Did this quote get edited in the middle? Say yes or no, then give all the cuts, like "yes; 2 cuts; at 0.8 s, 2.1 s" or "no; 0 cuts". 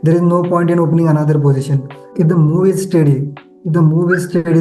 yes; 1 cut; at 2.0 s